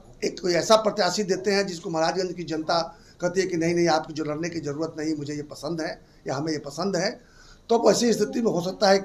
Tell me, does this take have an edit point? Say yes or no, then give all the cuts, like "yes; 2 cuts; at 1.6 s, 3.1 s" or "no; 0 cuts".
no; 0 cuts